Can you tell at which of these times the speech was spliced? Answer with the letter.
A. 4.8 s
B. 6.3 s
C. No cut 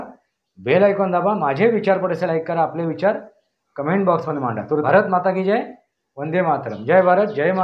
A